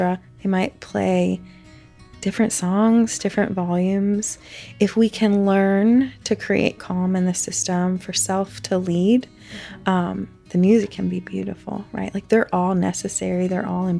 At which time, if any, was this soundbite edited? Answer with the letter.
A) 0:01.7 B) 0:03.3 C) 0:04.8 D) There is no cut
D